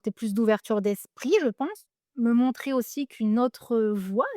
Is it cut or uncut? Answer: cut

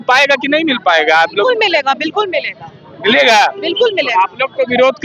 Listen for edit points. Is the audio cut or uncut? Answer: uncut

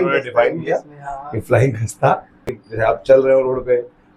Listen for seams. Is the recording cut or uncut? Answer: cut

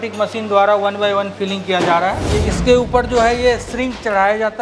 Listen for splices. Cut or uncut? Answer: cut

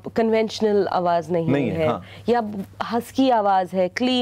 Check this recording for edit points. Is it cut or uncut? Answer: uncut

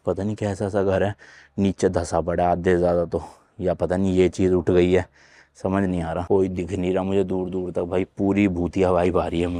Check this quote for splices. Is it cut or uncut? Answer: uncut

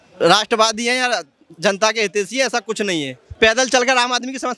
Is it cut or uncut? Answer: cut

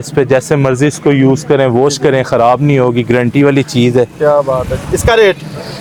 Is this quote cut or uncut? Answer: uncut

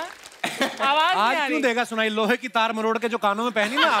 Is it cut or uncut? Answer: uncut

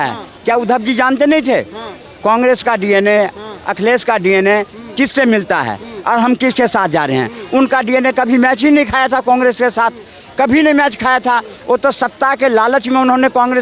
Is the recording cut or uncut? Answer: uncut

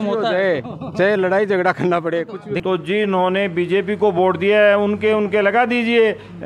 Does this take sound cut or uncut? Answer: cut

